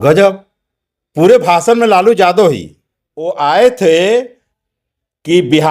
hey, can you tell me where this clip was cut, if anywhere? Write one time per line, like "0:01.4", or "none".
0:03.3